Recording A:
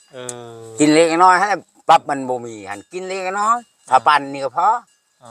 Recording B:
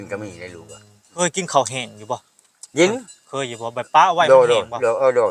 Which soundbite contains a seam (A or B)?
B